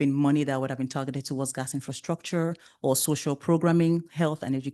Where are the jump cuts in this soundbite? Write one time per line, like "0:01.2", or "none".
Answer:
none